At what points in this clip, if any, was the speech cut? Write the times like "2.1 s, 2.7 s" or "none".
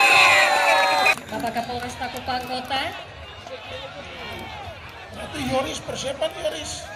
1.1 s